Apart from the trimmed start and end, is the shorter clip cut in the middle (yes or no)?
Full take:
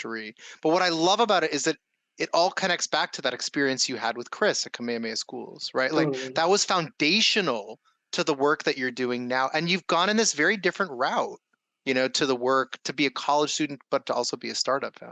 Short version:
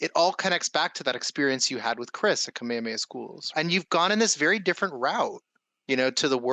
yes